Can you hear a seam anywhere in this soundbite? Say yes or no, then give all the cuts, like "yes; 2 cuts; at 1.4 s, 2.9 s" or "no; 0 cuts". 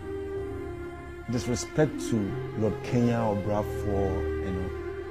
yes; 1 cut; at 0.9 s